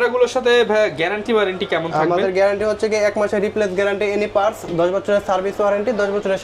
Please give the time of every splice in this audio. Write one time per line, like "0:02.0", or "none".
none